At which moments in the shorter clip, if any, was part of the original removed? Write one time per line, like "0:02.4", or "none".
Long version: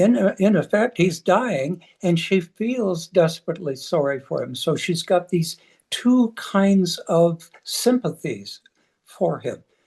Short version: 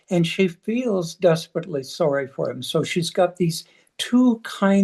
none